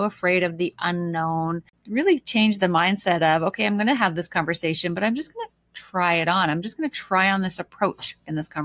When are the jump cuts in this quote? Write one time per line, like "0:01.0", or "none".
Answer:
0:01.7